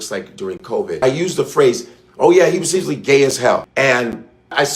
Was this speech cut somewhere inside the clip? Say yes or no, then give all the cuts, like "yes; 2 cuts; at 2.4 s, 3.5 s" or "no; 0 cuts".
yes; 2 cuts; at 1.0 s, 3.7 s